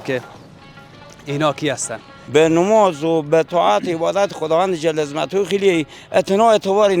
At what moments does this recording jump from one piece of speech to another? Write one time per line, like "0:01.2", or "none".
0:02.1